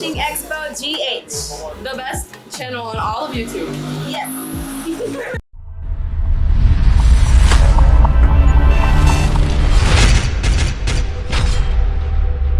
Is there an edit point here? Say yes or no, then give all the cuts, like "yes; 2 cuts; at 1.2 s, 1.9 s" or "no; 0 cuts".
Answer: no; 0 cuts